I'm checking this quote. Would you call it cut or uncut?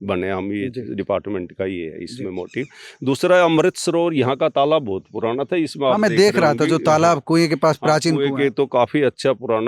uncut